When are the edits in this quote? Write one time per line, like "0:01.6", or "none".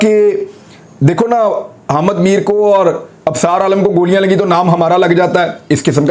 none